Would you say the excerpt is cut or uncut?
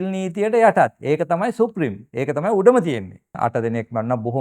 cut